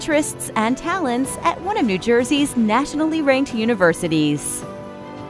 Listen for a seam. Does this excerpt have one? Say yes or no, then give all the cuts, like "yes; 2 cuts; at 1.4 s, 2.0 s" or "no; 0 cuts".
yes; 1 cut; at 4.4 s